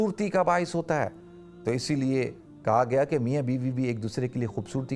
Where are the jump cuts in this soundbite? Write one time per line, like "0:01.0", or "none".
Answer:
none